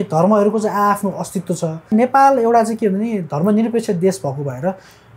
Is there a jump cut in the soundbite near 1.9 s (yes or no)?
yes